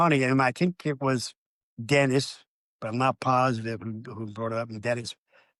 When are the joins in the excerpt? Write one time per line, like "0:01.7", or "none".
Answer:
none